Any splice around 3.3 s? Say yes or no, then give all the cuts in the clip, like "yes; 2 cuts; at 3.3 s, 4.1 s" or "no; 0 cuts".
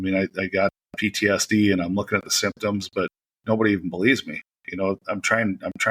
yes; 1 cut; at 3.3 s